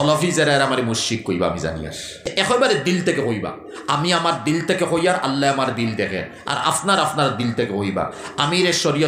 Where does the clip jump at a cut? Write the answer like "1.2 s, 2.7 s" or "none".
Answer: 2.2 s

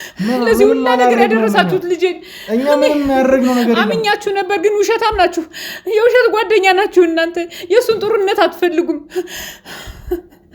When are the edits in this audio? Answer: none

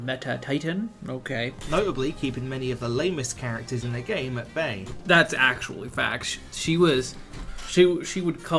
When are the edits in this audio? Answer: 4.9 s

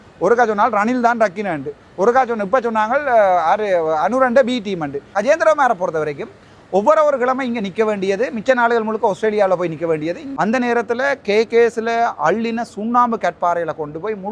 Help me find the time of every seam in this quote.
5.1 s, 10.3 s

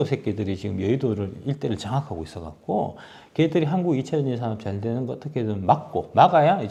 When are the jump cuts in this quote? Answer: none

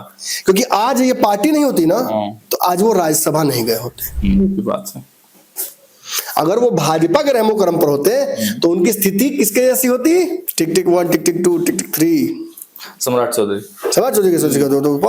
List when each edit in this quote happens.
10.4 s

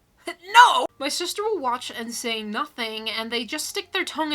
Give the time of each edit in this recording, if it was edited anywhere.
0.9 s

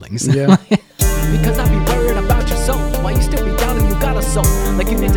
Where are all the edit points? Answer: 1.0 s

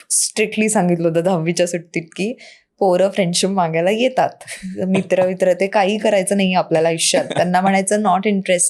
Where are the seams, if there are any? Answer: none

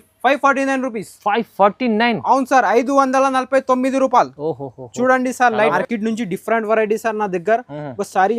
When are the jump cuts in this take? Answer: 5.7 s

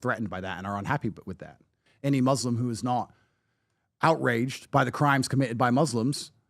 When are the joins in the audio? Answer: 1.9 s

